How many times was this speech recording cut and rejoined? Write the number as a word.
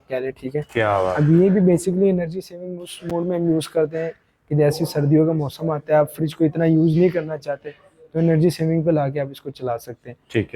zero